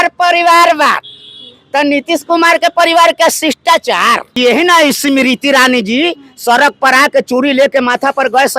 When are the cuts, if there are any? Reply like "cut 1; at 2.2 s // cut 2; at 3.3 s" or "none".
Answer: cut 1; at 4.4 s